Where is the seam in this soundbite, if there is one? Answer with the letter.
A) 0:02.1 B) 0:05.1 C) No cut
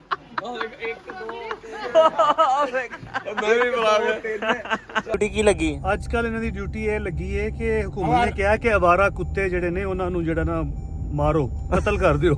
B